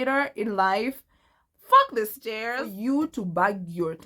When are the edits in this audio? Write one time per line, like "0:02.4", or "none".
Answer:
0:02.9